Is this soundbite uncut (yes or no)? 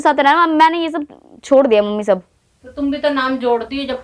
yes